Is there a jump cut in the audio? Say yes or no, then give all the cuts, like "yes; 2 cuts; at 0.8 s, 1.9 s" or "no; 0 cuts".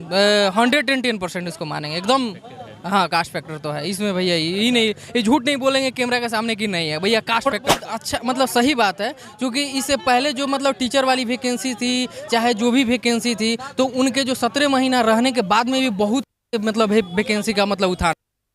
yes; 1 cut; at 7.8 s